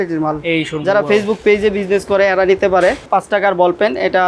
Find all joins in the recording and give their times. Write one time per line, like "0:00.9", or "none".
0:03.1